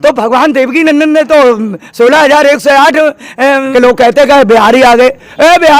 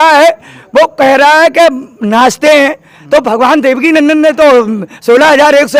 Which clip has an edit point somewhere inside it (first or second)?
first